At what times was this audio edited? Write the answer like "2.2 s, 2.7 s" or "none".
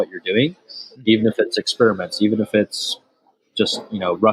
none